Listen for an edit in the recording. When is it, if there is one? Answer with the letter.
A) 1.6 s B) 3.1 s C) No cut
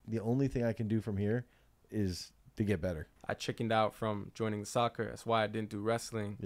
B